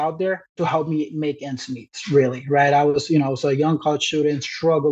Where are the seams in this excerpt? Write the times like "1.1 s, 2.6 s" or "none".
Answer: none